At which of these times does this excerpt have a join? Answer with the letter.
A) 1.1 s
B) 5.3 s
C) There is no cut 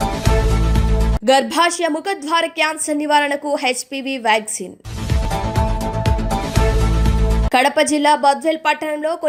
C